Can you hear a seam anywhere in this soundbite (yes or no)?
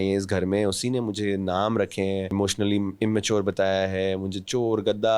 yes